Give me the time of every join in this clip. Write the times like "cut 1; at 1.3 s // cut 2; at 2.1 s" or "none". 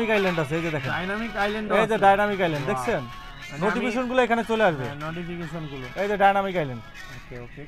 none